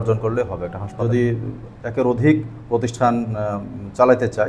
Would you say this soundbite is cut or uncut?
cut